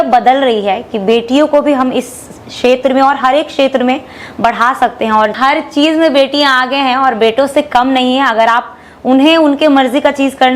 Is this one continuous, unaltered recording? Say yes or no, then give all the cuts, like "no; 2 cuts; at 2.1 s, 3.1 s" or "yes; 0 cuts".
no; 1 cut; at 5.3 s